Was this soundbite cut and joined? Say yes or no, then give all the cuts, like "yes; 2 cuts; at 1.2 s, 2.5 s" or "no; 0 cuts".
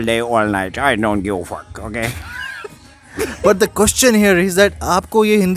no; 0 cuts